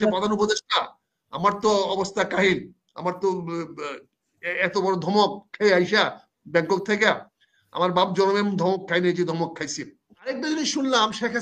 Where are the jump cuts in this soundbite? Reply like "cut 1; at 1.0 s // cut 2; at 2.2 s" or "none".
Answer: cut 1; at 10.4 s